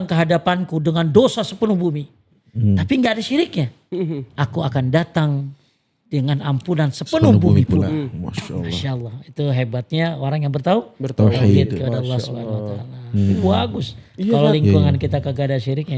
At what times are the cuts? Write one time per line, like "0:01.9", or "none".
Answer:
none